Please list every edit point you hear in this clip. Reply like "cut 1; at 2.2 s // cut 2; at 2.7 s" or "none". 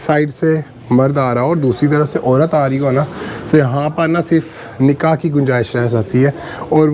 none